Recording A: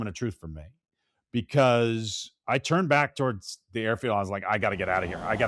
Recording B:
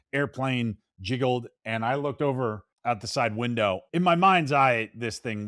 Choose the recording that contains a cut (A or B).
B